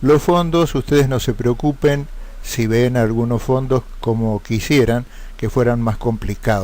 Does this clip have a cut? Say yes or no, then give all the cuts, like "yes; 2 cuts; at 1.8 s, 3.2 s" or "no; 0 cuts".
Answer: yes; 1 cut; at 1.3 s